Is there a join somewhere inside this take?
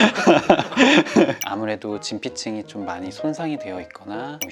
yes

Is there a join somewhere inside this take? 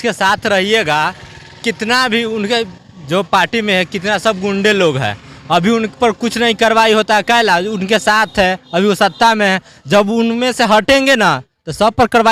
no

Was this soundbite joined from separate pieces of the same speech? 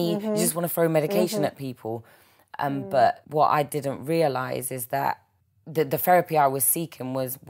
yes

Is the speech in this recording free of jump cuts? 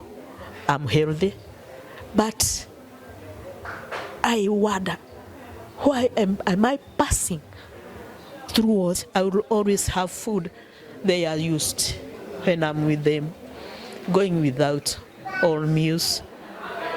no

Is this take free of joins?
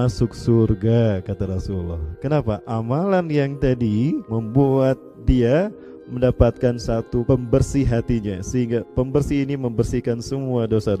no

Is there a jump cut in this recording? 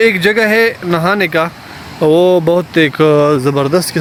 no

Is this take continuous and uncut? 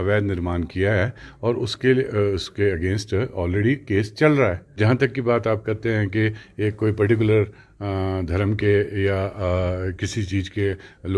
no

